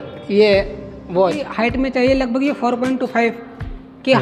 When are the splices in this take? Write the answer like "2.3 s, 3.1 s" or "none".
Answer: 1.4 s